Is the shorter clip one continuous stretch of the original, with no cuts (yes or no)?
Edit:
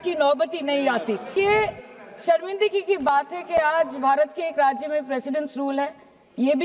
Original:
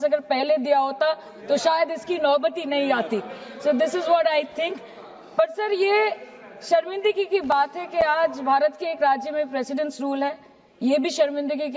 no